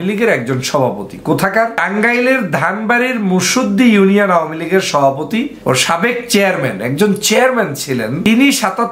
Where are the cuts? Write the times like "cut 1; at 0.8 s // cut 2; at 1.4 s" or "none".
cut 1; at 1.8 s // cut 2; at 5.5 s // cut 3; at 8.3 s

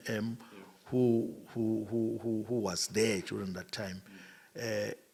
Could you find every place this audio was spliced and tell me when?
none

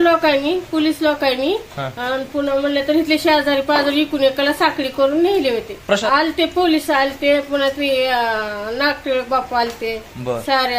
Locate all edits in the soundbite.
cut 1; at 6.0 s

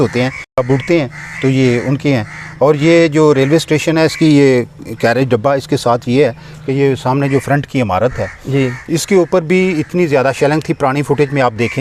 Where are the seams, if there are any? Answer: none

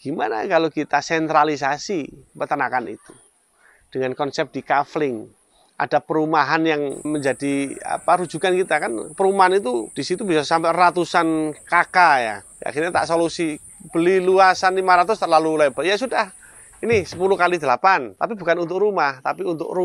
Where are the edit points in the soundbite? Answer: cut 1; at 12.5 s

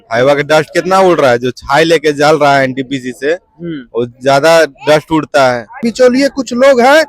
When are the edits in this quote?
cut 1; at 5.9 s

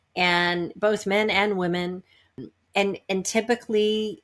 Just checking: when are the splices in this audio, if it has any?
cut 1; at 2.4 s

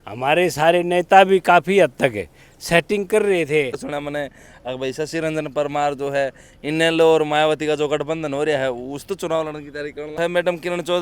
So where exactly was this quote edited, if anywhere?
cut 1; at 3.8 s // cut 2; at 10.2 s

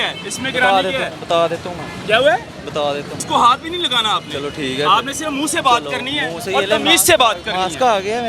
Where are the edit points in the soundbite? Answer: cut 1; at 3.2 s

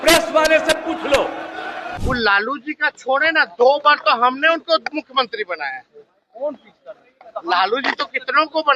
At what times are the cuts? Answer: cut 1; at 1.9 s

